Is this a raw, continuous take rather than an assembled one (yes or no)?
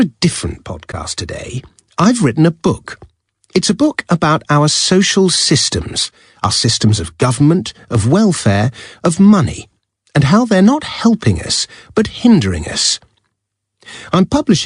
yes